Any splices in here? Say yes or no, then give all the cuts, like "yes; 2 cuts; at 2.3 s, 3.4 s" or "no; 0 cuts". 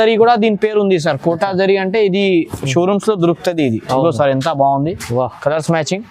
no; 0 cuts